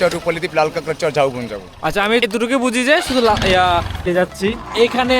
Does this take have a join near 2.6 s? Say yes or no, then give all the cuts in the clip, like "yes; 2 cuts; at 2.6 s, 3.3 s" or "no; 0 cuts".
no; 1 cut; at 4.0 s